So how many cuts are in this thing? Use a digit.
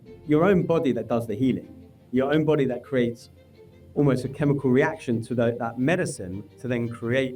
0